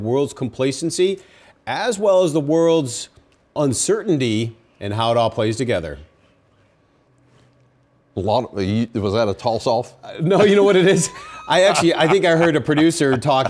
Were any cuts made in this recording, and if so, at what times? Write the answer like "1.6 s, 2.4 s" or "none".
0.9 s